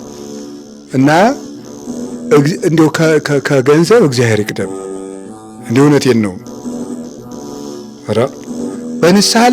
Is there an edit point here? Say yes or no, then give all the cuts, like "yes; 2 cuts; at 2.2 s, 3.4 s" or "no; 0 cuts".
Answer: yes; 1 cut; at 0.9 s